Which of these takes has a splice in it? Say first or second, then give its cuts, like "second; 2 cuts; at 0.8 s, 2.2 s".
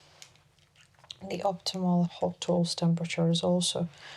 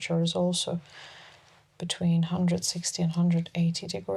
first; 1 cut; at 2.1 s